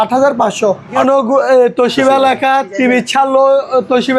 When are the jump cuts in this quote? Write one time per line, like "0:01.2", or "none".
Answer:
0:01.0